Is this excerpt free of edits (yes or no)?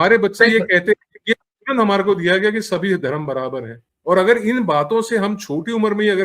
no